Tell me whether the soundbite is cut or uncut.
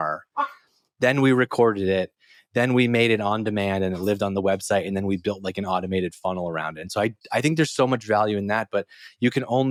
uncut